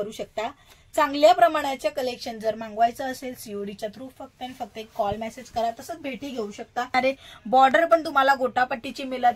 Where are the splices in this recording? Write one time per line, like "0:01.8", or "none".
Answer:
0:06.9